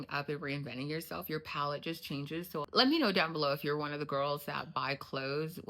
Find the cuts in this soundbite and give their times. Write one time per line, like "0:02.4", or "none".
0:02.7